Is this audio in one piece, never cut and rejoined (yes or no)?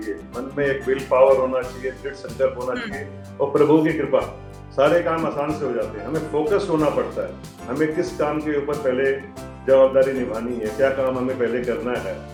yes